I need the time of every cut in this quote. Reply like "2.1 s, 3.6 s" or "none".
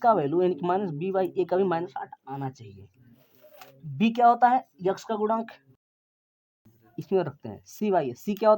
6.2 s